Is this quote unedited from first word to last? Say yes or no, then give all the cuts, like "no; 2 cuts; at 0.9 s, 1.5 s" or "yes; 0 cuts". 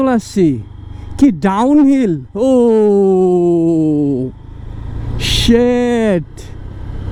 yes; 0 cuts